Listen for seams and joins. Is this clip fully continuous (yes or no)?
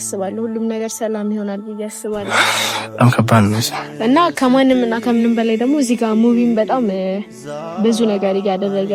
yes